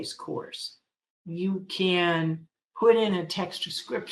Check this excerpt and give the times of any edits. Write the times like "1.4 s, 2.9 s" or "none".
none

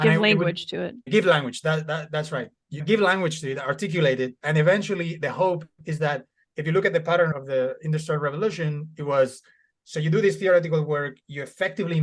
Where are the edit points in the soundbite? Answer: 1.0 s, 2.7 s

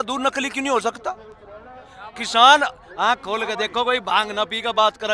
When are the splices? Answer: none

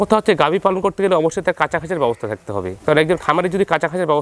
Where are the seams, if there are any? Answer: none

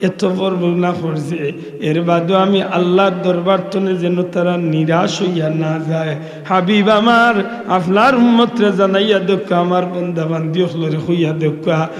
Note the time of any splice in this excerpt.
none

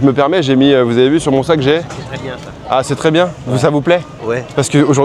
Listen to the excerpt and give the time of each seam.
none

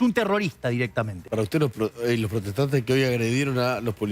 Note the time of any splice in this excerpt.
1.2 s

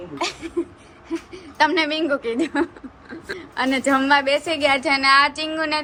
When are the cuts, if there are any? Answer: none

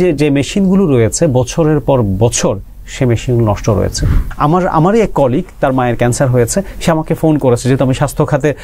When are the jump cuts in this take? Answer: 4.3 s

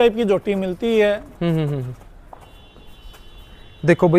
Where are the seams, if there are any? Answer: none

